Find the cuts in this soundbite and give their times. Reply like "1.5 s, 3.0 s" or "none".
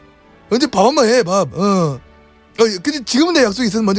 1.5 s